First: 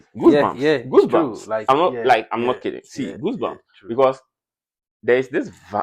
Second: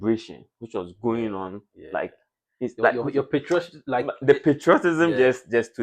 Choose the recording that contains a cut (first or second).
second